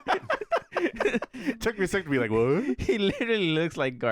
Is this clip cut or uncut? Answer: uncut